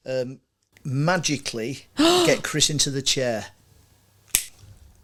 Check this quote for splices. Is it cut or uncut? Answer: uncut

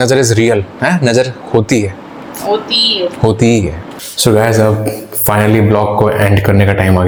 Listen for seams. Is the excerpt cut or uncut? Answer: uncut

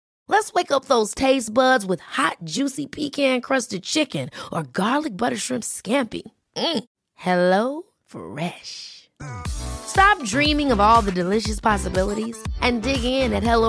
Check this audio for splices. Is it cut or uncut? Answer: uncut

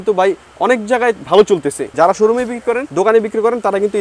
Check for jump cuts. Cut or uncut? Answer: cut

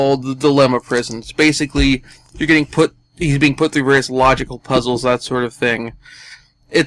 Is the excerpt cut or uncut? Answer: uncut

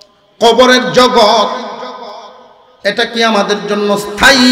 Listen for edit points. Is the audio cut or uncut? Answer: uncut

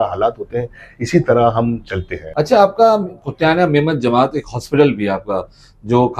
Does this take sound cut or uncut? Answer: cut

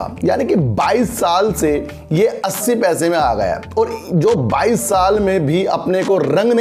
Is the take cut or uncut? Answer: uncut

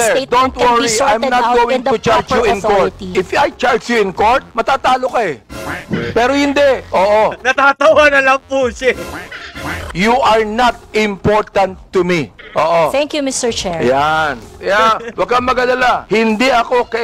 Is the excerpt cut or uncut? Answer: cut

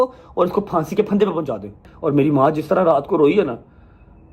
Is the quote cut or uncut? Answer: cut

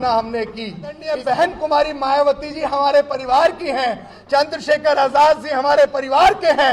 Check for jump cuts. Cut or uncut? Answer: cut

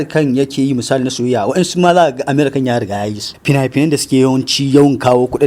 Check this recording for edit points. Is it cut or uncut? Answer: cut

